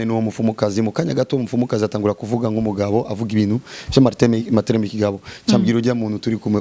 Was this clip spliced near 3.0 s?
no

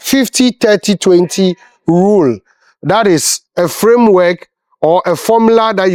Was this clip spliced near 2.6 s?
no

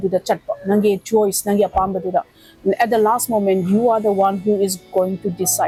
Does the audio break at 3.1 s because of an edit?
no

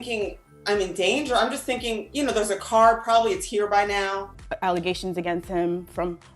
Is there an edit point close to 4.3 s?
yes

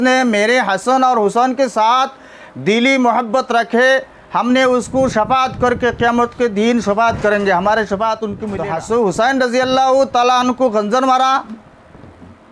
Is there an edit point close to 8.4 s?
yes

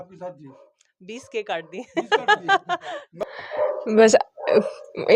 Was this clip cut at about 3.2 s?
yes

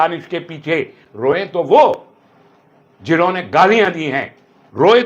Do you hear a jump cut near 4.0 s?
no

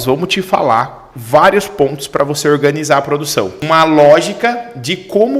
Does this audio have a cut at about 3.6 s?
yes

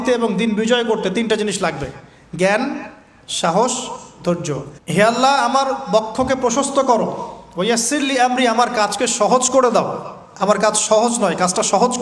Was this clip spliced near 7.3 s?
no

